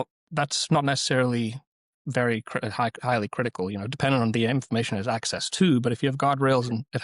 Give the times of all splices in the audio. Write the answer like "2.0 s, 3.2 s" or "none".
none